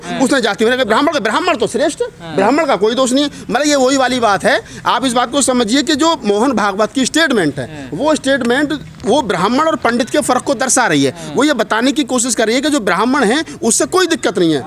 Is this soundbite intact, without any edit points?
yes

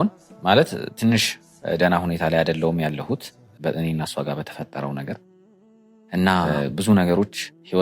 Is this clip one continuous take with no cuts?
no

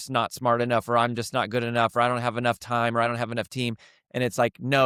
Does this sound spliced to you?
no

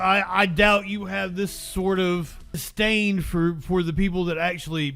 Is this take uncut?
no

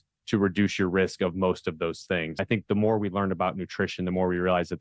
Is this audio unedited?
no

